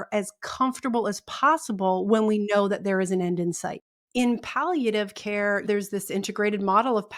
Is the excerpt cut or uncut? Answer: cut